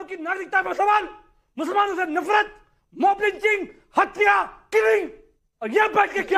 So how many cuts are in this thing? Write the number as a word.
zero